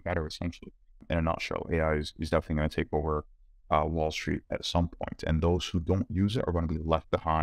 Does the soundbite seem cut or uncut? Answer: cut